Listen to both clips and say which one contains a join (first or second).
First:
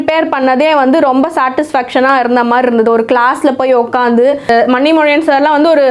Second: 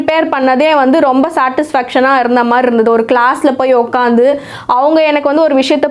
first